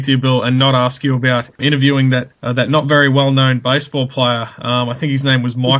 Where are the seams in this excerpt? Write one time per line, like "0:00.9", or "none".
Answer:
none